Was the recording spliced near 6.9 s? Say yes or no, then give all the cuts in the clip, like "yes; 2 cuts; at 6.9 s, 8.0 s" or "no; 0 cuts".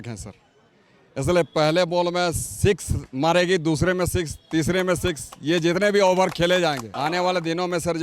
yes; 1 cut; at 6.9 s